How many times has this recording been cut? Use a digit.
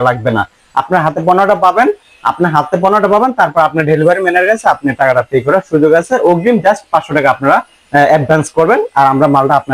0